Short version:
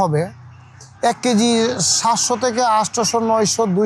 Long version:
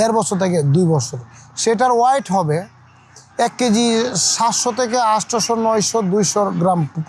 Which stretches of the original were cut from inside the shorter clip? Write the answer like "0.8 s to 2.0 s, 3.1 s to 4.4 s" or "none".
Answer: none